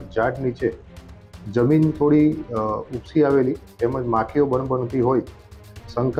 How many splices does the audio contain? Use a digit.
0